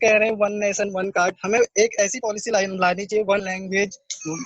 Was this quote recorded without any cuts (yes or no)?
no